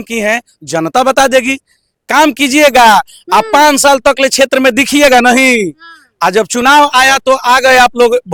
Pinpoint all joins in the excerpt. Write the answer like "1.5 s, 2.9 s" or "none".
none